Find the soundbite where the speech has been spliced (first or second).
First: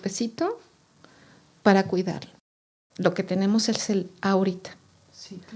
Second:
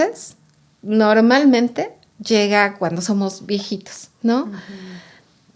first